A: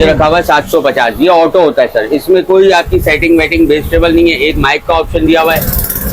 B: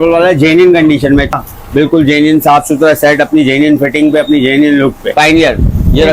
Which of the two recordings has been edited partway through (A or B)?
B